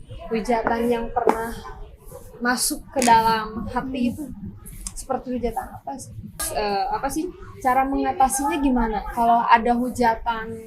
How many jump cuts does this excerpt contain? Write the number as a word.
one